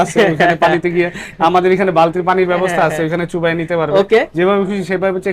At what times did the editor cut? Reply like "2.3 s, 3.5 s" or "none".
none